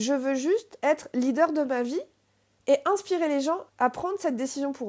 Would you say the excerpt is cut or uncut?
cut